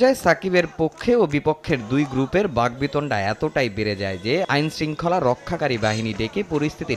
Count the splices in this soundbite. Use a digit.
0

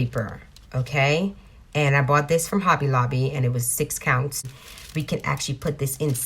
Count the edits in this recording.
1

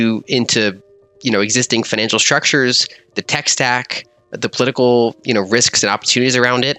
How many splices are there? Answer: 1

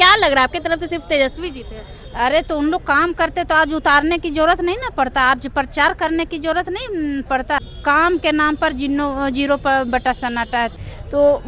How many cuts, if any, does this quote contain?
2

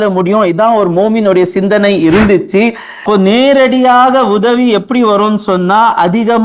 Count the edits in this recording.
1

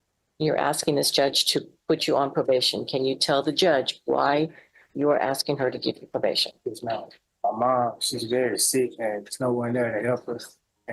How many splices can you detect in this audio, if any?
1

